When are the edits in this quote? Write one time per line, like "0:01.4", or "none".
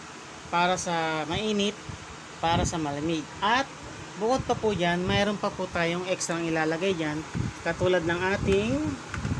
none